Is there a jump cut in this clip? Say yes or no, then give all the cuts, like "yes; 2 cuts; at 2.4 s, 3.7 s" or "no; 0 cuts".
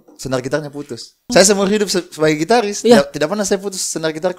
yes; 1 cut; at 1.3 s